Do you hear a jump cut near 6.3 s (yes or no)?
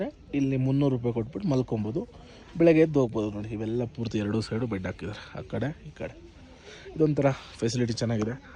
no